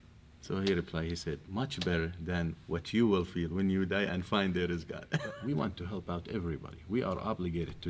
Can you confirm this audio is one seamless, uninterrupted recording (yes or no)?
no